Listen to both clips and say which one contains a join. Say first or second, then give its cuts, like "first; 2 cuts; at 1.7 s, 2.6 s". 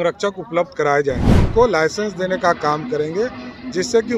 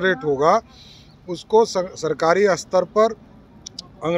first; 1 cut; at 1.4 s